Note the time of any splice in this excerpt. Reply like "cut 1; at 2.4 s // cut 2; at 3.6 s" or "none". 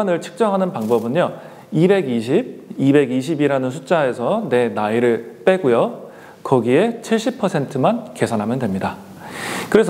none